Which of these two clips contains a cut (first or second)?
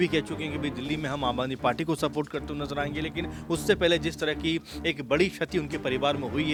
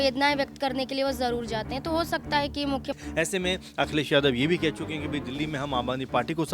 second